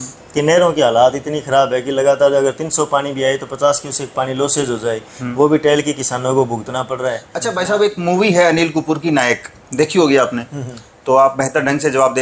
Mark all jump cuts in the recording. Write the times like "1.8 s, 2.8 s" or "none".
7.3 s